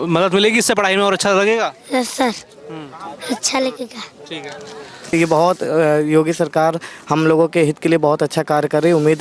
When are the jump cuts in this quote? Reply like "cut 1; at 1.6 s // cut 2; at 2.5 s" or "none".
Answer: cut 1; at 5.1 s